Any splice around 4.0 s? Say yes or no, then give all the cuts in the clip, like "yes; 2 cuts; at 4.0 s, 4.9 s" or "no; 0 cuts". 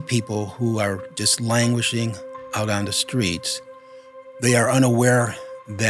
yes; 1 cut; at 4.0 s